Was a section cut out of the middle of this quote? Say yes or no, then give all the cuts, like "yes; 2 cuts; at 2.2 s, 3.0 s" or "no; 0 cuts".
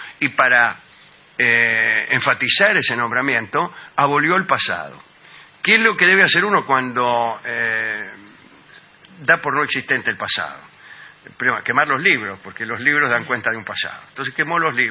yes; 1 cut; at 10.3 s